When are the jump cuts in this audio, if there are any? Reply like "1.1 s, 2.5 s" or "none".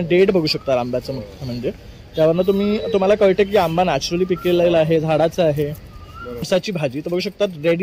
6.5 s